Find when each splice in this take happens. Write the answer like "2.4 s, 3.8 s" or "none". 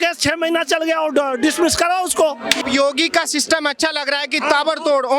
2.6 s